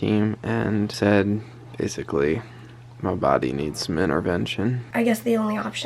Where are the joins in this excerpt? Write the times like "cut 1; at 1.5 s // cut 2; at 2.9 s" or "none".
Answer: cut 1; at 0.9 s // cut 2; at 4.8 s